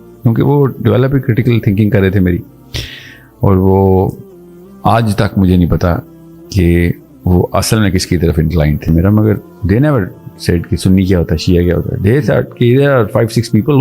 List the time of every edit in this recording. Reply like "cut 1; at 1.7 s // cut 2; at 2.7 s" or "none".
cut 1; at 8.9 s